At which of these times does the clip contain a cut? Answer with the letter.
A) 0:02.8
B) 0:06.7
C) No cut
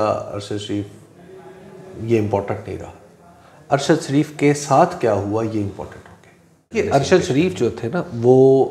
B